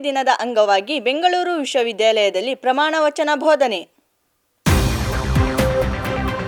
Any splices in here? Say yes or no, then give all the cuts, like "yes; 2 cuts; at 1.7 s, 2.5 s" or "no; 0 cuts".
no; 0 cuts